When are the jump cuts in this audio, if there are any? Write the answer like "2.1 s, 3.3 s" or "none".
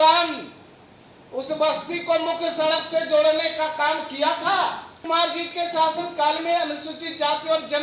5.0 s